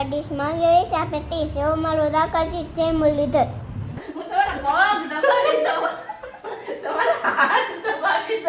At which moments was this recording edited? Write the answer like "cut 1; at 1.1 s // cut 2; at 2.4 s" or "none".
cut 1; at 4.0 s